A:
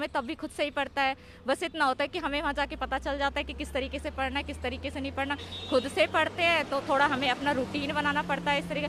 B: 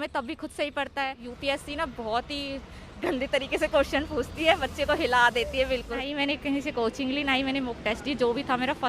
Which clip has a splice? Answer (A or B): B